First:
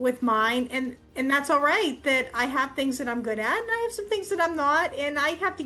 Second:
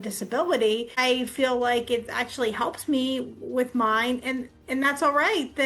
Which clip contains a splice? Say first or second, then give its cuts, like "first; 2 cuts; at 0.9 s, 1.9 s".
second; 1 cut; at 1.0 s